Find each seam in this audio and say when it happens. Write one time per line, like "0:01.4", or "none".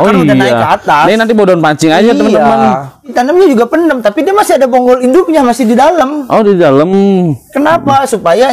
0:03.1